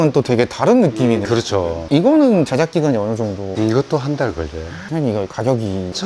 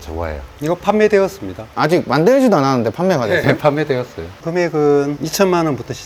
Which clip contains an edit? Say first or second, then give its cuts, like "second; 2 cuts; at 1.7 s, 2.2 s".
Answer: first; 1 cut; at 4.8 s